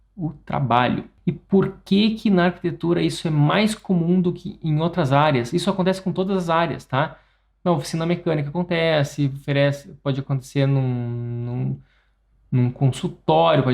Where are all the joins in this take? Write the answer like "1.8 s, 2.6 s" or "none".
1.1 s